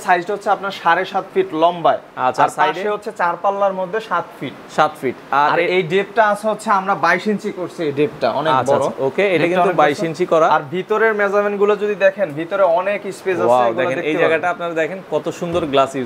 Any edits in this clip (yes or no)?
no